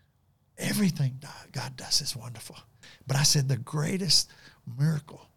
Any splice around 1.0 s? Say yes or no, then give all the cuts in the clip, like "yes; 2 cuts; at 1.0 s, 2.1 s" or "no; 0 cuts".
no; 1 cut; at 2.8 s